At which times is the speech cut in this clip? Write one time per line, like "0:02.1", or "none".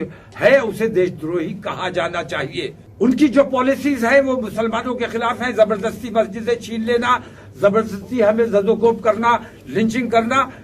0:02.8

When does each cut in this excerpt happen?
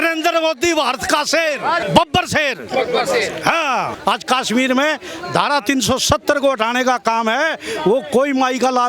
0:01.8
0:03.9

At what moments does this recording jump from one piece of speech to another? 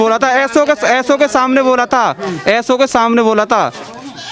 none

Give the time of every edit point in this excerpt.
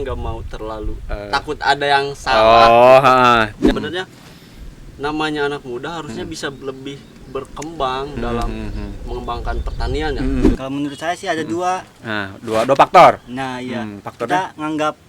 0:03.7
0:10.5

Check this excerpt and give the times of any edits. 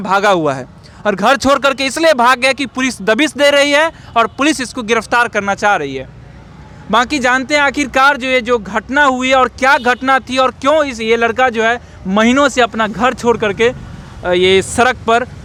none

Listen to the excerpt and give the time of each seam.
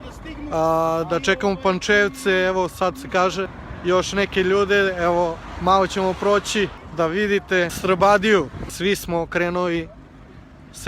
0:03.6
0:06.8
0:07.8
0:08.6

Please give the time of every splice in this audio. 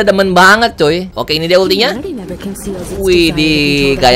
0:01.1

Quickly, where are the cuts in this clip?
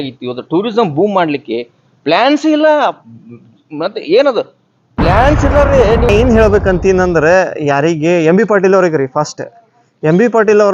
0:06.1

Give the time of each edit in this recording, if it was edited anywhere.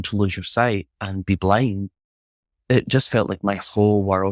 none

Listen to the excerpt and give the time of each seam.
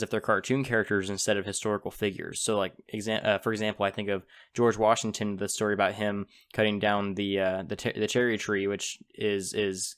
none

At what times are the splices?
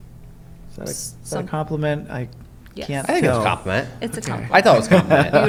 none

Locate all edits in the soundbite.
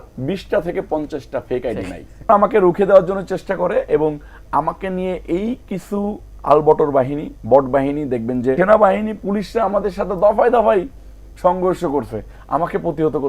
0:02.3
0:08.6

